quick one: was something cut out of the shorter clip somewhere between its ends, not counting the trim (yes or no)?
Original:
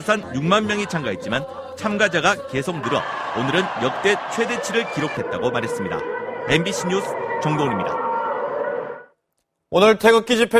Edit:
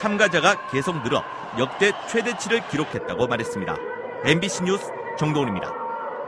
yes